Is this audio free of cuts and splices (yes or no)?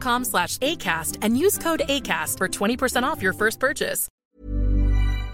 no